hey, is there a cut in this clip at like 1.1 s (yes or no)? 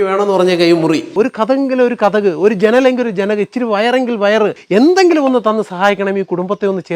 yes